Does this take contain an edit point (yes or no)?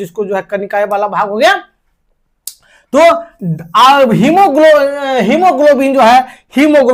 no